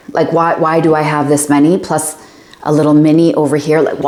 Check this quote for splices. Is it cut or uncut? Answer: uncut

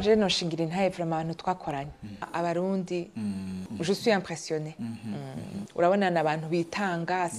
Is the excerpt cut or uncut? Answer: cut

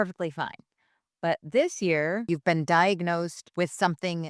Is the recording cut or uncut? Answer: cut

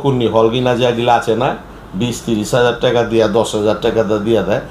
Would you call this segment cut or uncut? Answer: uncut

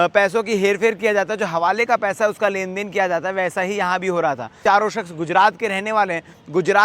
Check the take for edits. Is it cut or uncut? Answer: cut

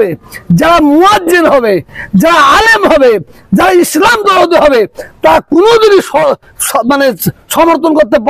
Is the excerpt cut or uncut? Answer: uncut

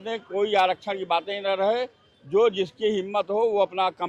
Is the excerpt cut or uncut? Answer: uncut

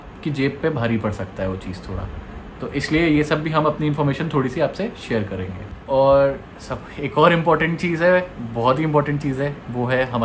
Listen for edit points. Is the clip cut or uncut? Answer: uncut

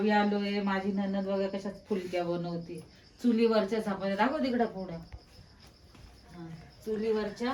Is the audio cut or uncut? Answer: uncut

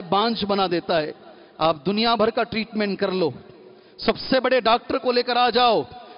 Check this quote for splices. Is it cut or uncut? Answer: uncut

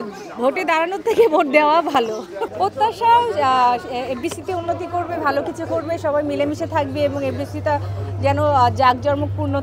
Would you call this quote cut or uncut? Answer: cut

